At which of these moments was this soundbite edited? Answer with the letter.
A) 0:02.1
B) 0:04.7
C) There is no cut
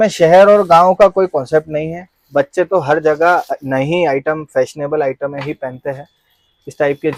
C